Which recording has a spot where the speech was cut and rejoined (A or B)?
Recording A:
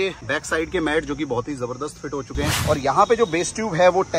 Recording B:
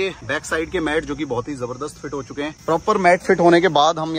A